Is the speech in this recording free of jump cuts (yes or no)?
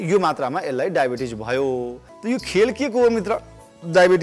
no